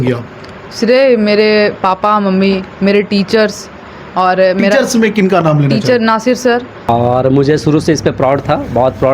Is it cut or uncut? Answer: cut